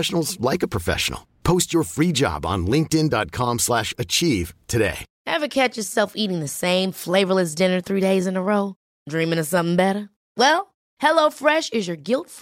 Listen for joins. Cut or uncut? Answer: cut